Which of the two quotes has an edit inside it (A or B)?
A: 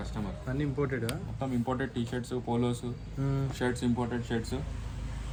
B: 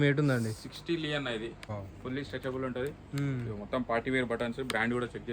B